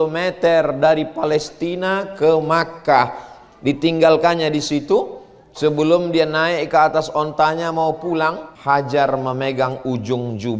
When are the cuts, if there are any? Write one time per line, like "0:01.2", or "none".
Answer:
0:08.5